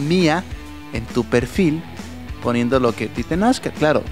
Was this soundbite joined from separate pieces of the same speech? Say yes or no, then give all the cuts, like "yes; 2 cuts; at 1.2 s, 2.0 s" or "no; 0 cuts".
no; 0 cuts